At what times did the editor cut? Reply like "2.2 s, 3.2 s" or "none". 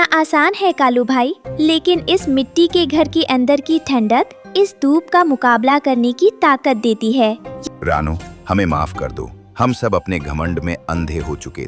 7.5 s